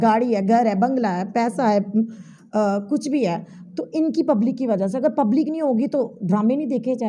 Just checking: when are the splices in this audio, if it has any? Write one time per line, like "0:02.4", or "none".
none